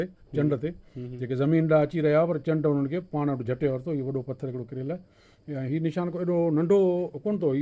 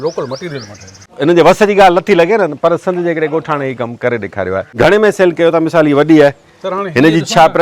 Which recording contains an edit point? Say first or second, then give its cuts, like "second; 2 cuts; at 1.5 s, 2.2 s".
second; 2 cuts; at 1.0 s, 4.7 s